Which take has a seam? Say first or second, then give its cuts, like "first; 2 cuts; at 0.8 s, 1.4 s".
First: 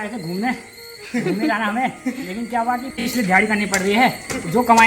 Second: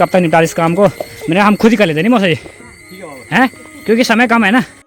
first; 1 cut; at 3.1 s